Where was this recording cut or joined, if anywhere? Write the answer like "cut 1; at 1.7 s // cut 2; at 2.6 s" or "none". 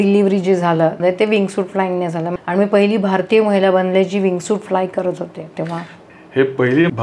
cut 1; at 1.0 s // cut 2; at 2.3 s